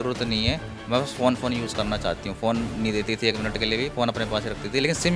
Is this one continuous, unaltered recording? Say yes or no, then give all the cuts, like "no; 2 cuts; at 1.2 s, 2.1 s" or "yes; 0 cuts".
yes; 0 cuts